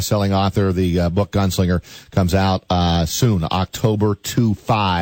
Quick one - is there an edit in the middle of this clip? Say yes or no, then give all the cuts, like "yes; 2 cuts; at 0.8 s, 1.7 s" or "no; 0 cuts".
no; 0 cuts